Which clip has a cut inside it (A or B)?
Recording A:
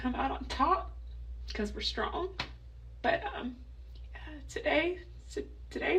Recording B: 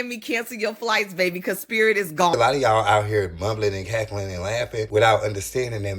B